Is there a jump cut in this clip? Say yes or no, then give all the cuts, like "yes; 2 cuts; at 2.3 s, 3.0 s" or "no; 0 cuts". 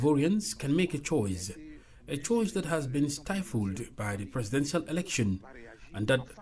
no; 0 cuts